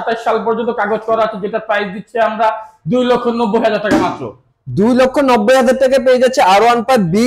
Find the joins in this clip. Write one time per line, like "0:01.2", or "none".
none

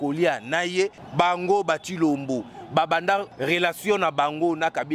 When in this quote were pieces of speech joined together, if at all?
0:01.0
0:03.3

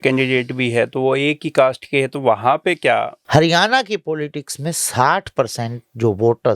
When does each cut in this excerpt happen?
0:03.2

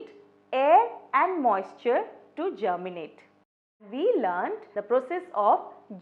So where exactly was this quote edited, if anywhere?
0:03.7
0:04.7

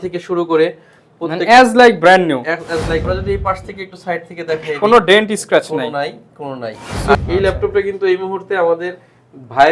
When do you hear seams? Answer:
0:03.0
0:07.1

